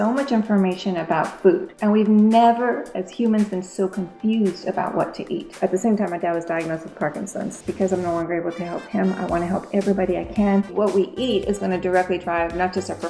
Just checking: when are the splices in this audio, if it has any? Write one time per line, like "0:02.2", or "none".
0:01.7
0:05.5
0:07.5
0:10.7